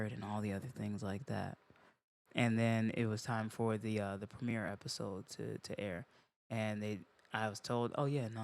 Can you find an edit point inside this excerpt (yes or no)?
no